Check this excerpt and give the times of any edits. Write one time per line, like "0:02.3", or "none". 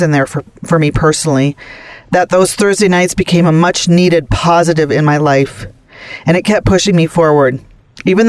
none